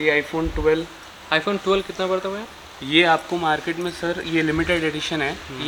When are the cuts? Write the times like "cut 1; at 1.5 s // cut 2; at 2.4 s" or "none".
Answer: none